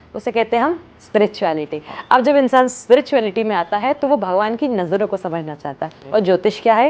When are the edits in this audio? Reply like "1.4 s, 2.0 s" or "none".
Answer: none